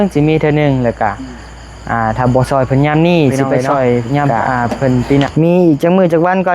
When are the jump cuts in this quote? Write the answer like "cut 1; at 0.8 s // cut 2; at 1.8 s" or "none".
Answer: cut 1; at 5.3 s